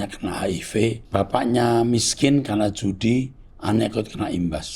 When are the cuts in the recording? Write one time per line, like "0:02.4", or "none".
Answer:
0:01.0